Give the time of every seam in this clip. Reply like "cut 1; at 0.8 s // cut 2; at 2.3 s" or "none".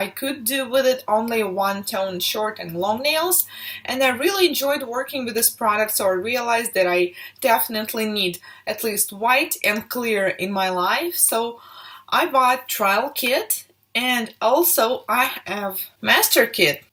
none